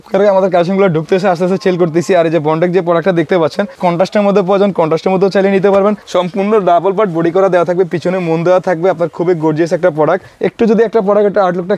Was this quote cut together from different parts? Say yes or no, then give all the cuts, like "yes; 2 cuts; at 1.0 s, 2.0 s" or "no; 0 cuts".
yes; 3 cuts; at 3.8 s, 6.0 s, 10.3 s